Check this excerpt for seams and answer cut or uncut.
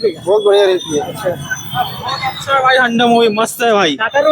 uncut